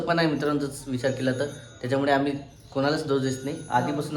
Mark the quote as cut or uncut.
uncut